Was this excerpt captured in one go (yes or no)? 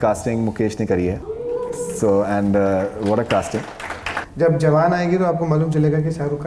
no